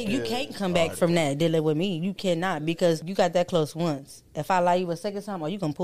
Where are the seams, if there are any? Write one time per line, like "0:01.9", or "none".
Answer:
0:03.1

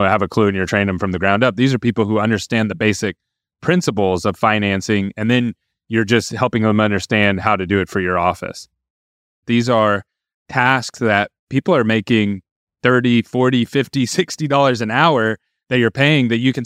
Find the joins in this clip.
0:09.4

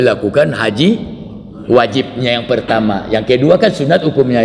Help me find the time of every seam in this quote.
none

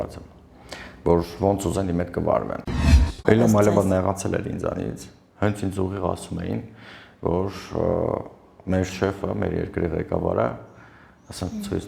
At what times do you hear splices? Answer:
0:03.0

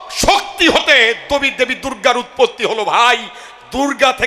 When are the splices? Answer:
none

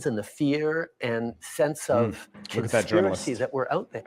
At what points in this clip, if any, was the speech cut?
0:02.5

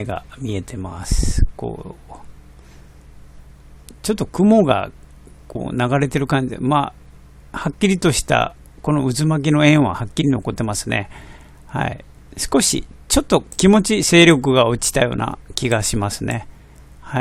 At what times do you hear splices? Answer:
0:01.7

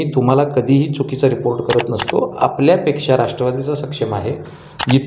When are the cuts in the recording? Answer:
none

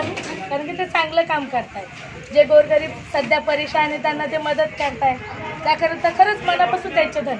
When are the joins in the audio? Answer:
none

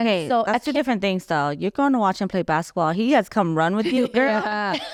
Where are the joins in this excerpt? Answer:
none

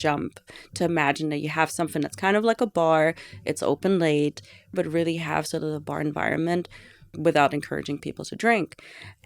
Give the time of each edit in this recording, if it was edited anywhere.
0:04.7
0:07.1

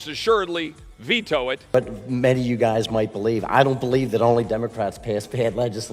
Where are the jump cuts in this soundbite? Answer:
0:01.6

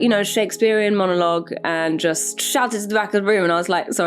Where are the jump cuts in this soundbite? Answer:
0:02.3

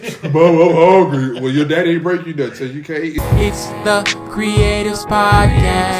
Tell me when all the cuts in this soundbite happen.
0:03.2

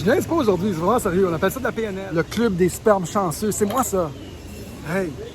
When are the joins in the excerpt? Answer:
0:01.9

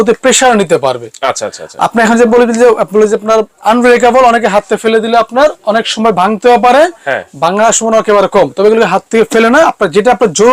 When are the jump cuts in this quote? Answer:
none

